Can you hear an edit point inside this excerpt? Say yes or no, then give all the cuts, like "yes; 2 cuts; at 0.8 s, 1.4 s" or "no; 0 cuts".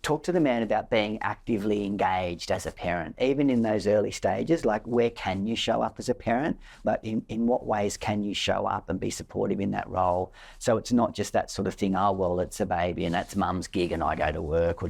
no; 0 cuts